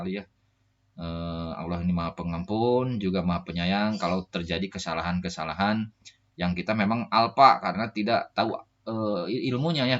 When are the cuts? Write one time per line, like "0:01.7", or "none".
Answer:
none